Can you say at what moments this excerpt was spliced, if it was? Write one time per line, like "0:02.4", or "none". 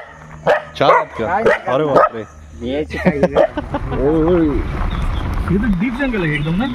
0:03.8